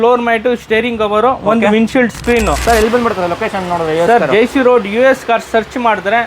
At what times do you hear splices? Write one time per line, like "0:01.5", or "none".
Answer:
0:02.6